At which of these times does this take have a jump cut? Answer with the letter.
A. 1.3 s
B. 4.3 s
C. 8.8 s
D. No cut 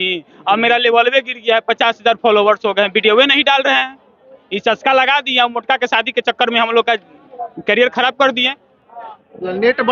D